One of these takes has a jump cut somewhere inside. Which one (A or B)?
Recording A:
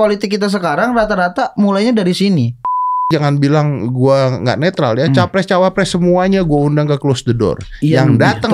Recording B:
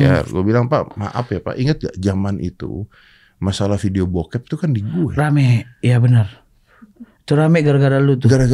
A